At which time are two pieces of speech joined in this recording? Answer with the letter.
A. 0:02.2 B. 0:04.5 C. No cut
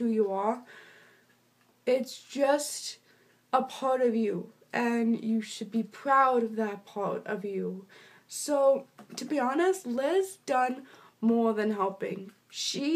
A